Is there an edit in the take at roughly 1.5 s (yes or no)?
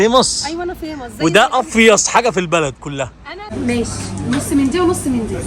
no